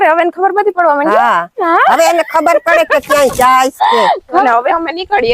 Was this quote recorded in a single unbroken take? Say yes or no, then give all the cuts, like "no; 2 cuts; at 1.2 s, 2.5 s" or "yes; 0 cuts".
no; 1 cut; at 4.4 s